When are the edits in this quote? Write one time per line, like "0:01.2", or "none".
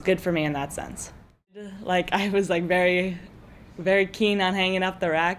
0:01.8